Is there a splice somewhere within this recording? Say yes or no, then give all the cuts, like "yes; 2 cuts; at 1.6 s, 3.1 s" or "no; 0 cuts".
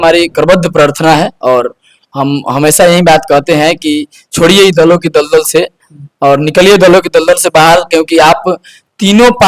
no; 0 cuts